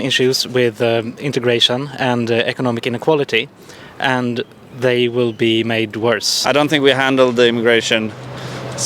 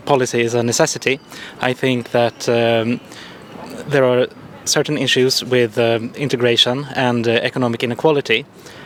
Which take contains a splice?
first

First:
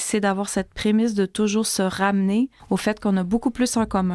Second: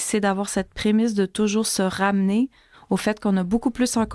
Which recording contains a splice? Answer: first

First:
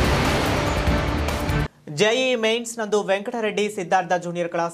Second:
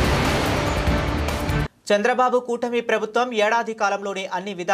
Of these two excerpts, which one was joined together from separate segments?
second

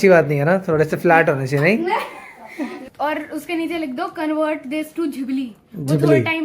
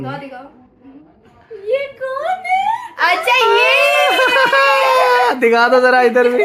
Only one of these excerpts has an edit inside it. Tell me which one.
first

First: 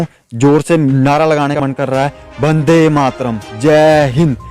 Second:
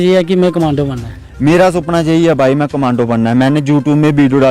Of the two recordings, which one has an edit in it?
first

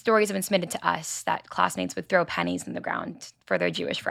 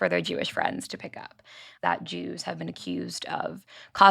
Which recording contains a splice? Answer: second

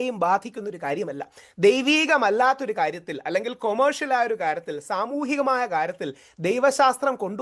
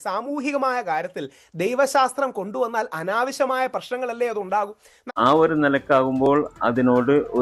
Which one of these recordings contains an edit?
second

